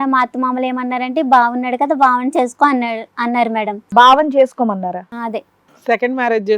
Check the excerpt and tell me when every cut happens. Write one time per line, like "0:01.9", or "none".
0:03.8